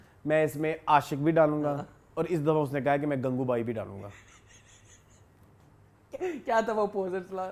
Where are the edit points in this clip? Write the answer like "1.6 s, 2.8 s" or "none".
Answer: none